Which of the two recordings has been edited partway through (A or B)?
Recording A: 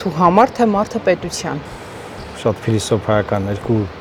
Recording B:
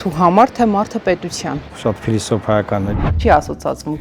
B